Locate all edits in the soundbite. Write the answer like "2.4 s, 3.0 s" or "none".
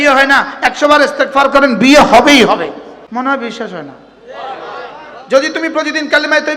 2.9 s, 5.1 s

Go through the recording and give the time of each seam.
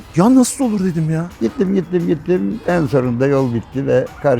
1.3 s

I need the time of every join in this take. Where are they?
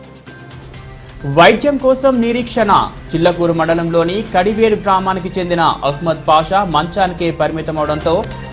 none

